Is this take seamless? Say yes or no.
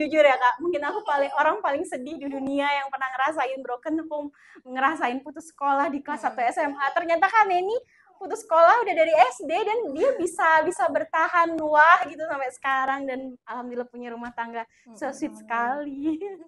yes